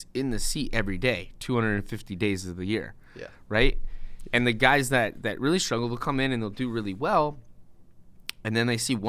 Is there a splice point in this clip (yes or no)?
no